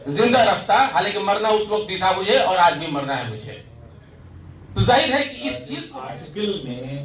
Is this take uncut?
no; 1 cut; at 5.7 s

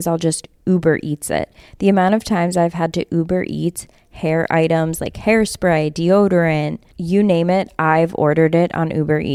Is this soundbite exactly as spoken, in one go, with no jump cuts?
yes; 0 cuts

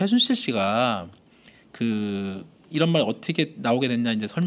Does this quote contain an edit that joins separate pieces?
yes; 1 cut; at 3.2 s

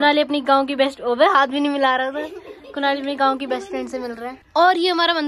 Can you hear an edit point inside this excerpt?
no; 0 cuts

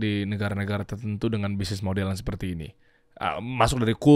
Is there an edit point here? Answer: no; 0 cuts

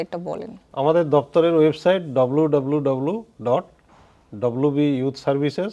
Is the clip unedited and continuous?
yes; 0 cuts

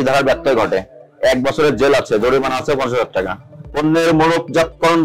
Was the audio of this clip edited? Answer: yes; 1 cut; at 3.5 s

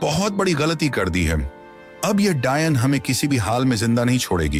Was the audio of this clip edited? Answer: no; 0 cuts

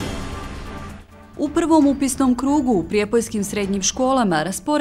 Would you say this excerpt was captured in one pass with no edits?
no; 1 cut; at 1.3 s

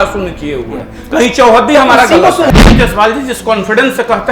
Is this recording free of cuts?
no; 1 cut; at 2.5 s

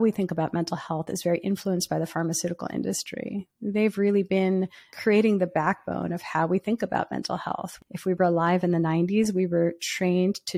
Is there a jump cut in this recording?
yes; 2 cuts; at 4.8 s, 7.7 s

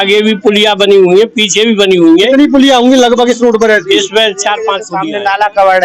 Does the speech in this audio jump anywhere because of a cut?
yes; 1 cut; at 4.9 s

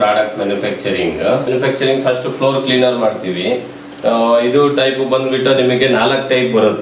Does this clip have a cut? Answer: yes; 1 cut; at 1.5 s

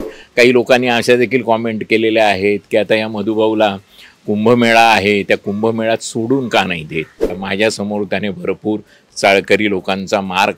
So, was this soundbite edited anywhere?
yes; 1 cut; at 7.4 s

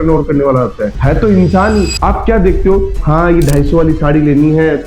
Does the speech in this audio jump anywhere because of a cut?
yes; 1 cut; at 1.9 s

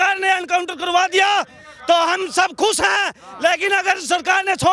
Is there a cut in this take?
no; 0 cuts

